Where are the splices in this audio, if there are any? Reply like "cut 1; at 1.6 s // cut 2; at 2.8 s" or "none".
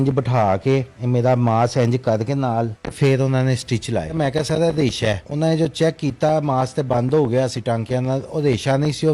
cut 1; at 0.9 s // cut 2; at 2.8 s // cut 3; at 4.1 s // cut 4; at 5.3 s